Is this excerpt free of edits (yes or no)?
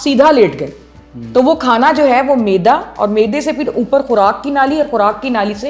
yes